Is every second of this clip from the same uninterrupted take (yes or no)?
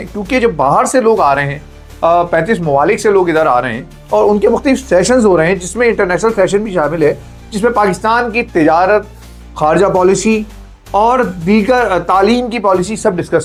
yes